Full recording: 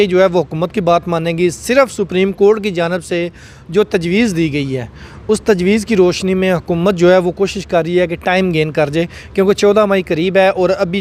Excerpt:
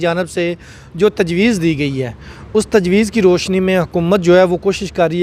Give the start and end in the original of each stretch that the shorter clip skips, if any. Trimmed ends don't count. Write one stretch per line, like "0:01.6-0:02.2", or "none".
none